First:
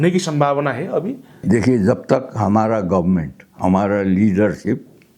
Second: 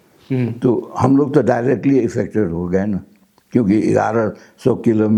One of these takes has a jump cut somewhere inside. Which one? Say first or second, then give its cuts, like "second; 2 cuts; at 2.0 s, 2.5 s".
first; 1 cut; at 1.3 s